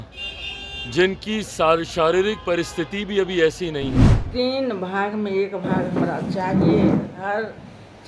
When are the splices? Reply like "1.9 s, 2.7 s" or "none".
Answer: 4.1 s